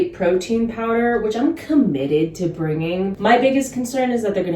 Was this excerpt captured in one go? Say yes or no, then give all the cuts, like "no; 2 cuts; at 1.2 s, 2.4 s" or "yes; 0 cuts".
no; 1 cut; at 3.1 s